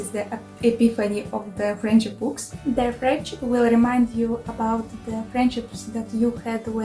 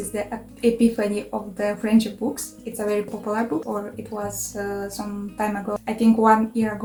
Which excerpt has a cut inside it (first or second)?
first